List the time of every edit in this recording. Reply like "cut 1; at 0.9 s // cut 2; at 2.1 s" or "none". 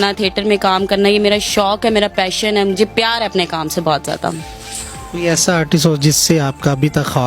none